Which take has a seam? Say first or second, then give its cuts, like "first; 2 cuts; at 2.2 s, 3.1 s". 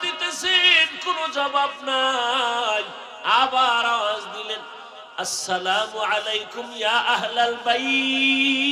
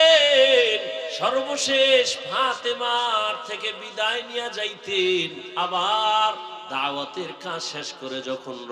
second; 3 cuts; at 1.1 s, 5.4 s, 6.7 s